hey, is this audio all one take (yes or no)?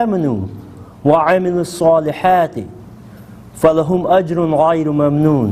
yes